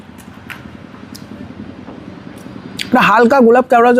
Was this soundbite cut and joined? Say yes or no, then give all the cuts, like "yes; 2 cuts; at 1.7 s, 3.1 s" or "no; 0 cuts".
no; 0 cuts